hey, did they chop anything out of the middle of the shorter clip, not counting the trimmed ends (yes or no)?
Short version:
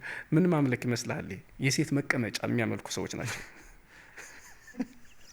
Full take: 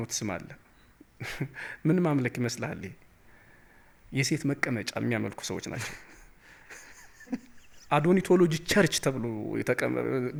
yes